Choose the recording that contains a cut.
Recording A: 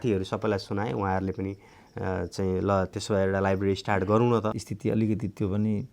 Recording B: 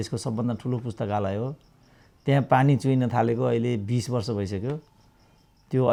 A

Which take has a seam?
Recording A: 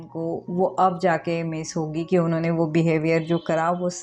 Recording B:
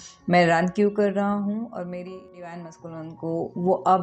B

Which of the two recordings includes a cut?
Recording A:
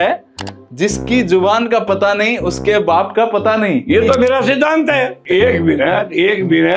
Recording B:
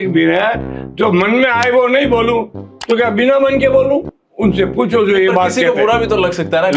A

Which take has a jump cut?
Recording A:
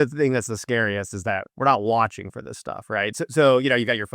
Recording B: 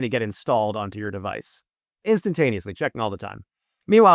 A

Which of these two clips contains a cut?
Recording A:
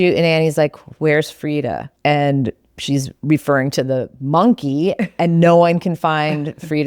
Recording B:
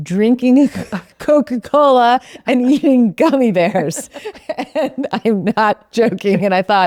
A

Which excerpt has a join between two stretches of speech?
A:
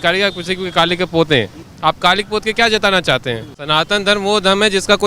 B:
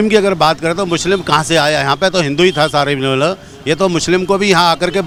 A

